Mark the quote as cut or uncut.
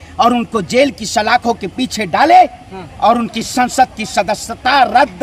uncut